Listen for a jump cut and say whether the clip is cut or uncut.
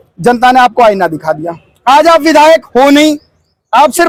uncut